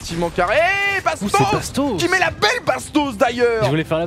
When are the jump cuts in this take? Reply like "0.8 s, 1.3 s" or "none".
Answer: none